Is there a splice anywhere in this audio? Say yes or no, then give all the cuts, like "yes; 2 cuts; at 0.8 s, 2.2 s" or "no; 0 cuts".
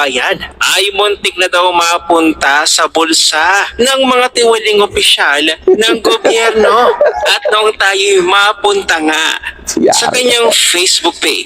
no; 0 cuts